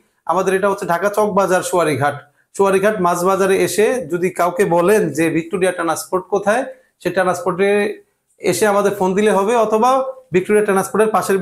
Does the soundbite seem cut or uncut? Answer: uncut